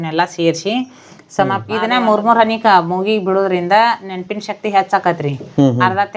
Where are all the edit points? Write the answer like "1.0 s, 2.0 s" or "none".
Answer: 1.4 s

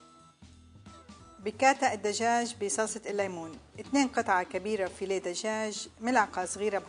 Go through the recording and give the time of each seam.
none

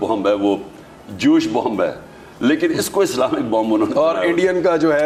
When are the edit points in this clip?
none

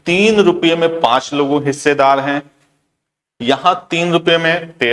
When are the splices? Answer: none

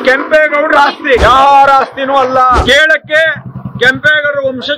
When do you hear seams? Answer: 1.2 s, 2.6 s

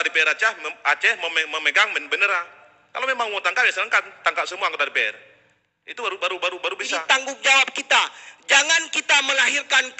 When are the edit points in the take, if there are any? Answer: 7.0 s

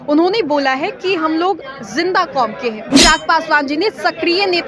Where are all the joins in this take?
2.9 s

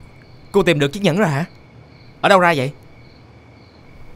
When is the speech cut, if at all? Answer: none

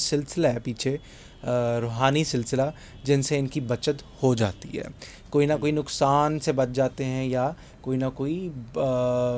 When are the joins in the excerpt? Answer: none

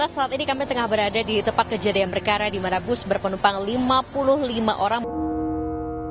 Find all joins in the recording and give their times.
5.0 s

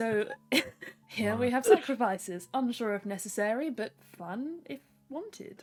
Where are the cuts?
none

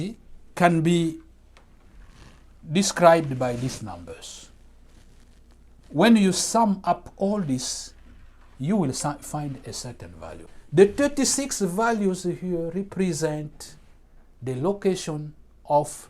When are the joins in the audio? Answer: 10.5 s

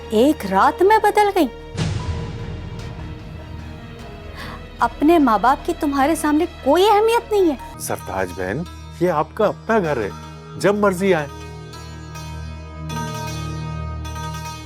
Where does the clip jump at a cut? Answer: 7.7 s

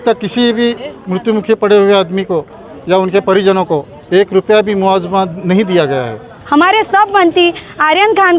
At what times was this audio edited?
6.3 s

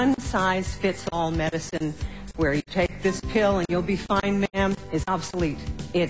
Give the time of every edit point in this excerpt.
2.2 s

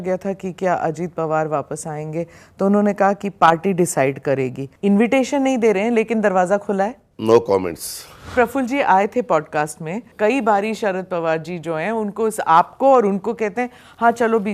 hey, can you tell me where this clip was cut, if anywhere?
4.6 s, 8.3 s, 10.1 s

